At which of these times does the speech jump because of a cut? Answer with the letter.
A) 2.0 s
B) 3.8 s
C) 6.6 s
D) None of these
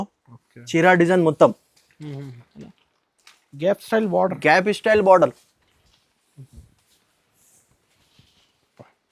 D